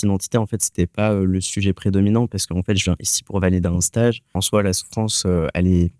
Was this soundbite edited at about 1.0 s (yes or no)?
no